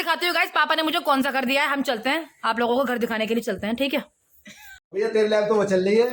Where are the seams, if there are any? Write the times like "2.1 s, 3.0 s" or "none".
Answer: 4.8 s